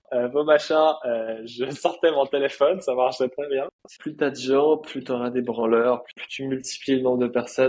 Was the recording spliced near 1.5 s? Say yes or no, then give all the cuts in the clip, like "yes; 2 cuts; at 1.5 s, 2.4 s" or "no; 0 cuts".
no; 2 cuts; at 3.9 s, 6.2 s